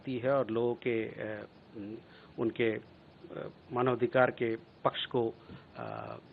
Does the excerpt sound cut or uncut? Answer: uncut